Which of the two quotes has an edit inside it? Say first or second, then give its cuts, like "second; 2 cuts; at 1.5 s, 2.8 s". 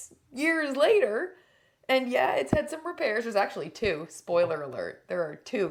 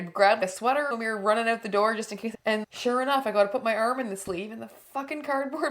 second; 2 cuts; at 0.9 s, 2.3 s